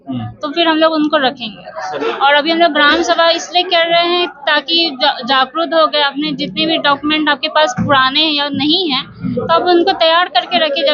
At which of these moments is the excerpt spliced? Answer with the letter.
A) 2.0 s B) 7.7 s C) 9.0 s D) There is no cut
A